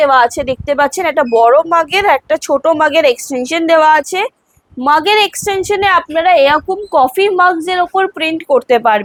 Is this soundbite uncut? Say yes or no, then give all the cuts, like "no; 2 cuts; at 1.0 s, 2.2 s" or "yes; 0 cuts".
yes; 0 cuts